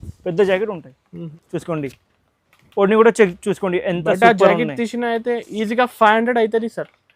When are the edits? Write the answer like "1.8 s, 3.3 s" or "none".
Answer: 1.1 s